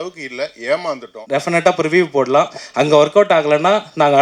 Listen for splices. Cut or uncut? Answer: cut